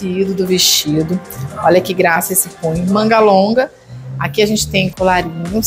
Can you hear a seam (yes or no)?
no